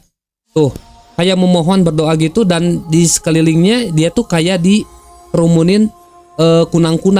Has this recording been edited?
no; 0 cuts

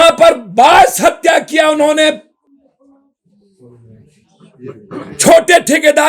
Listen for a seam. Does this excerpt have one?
no; 0 cuts

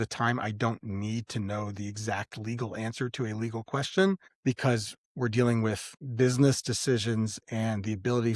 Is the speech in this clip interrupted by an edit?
no; 0 cuts

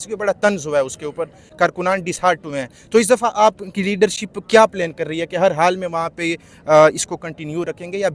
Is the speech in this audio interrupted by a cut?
no; 0 cuts

